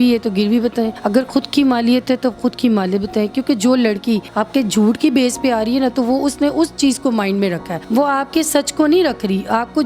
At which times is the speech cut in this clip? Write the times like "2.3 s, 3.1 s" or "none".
1.0 s, 4.3 s, 7.7 s